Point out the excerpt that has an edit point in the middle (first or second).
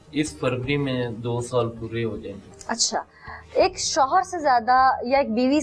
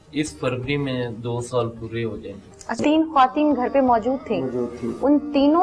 second